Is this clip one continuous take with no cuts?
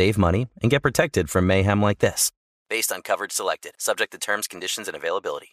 yes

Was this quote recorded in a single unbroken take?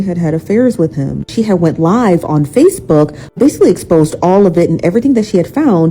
no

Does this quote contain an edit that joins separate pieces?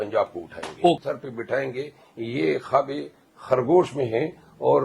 yes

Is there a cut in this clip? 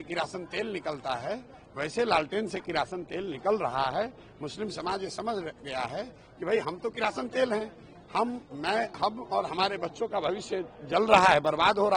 no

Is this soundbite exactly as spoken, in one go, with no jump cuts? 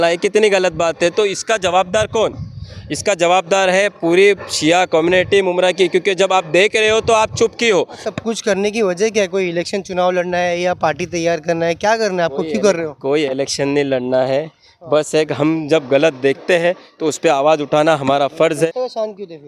no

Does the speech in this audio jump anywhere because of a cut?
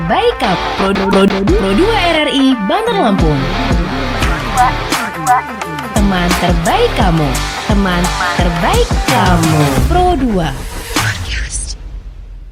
no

